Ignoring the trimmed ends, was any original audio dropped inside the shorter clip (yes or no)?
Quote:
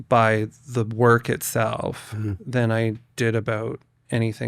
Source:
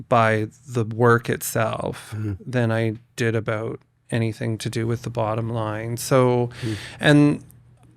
no